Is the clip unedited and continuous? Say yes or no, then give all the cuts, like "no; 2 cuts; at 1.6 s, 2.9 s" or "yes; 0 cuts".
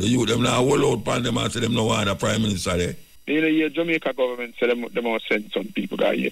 no; 1 cut; at 3.1 s